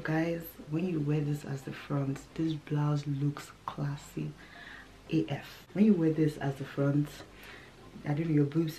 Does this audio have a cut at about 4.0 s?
no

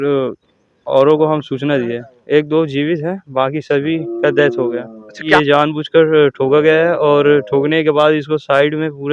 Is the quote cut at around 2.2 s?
yes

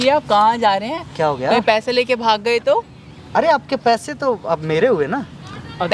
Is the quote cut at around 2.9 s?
no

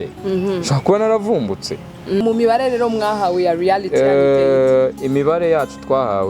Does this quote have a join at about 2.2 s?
yes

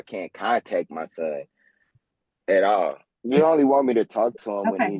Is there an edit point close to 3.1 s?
yes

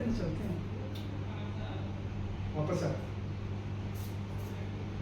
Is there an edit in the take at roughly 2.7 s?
no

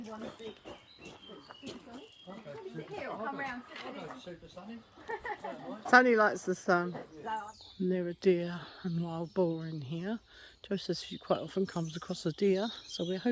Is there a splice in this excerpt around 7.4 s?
yes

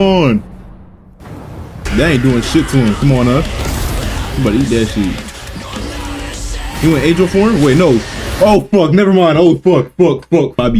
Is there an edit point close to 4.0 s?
no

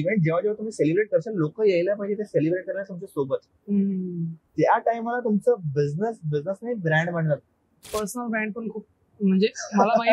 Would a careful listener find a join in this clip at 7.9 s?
yes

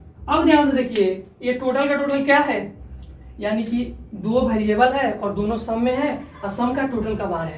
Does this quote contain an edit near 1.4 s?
no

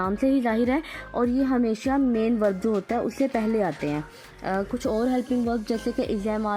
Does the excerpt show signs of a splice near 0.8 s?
no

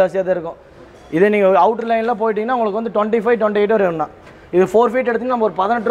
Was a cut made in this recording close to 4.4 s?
no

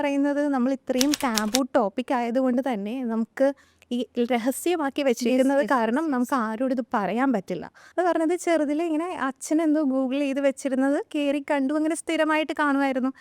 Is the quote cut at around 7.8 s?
yes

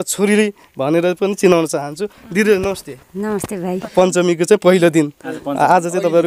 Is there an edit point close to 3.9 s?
yes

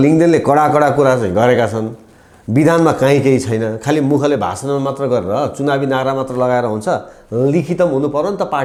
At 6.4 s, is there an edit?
no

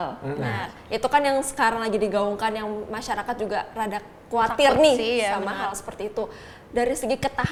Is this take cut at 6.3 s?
no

